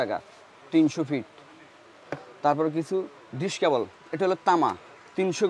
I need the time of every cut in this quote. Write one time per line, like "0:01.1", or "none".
none